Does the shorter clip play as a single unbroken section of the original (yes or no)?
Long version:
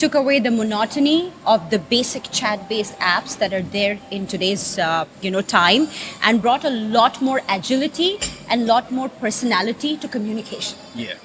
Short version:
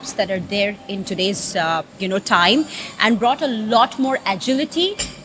yes